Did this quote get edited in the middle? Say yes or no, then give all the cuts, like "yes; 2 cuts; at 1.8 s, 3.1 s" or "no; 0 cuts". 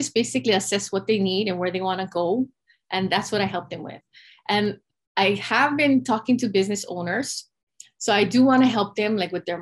no; 0 cuts